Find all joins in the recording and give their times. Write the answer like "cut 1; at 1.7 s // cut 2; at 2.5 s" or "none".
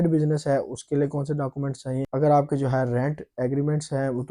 none